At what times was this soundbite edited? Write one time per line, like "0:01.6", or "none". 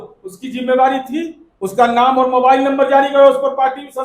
0:01.4

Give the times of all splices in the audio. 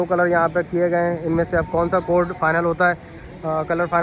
none

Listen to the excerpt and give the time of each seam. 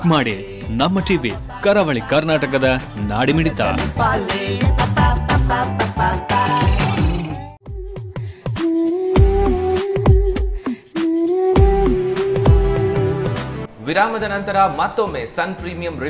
none

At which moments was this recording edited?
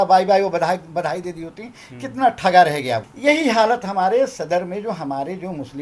0:03.0

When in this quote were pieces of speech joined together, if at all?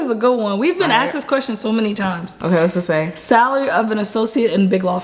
none

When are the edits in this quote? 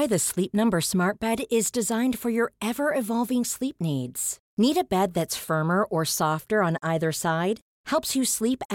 none

